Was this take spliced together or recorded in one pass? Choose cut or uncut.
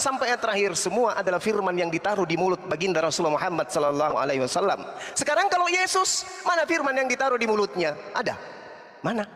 uncut